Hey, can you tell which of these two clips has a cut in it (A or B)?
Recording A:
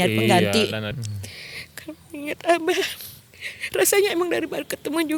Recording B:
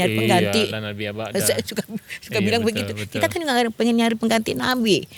A